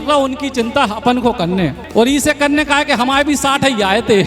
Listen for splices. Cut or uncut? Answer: cut